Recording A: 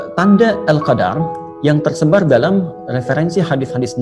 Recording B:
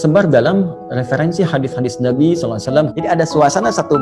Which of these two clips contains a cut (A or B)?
B